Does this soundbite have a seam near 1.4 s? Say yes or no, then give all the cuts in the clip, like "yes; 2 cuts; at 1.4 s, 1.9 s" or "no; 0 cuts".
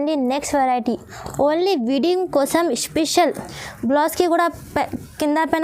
no; 1 cut; at 3.4 s